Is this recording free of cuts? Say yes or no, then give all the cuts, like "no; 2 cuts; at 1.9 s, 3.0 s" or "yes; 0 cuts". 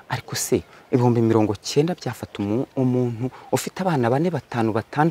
yes; 0 cuts